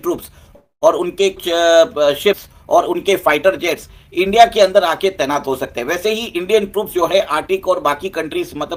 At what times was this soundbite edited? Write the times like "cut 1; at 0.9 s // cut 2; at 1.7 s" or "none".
none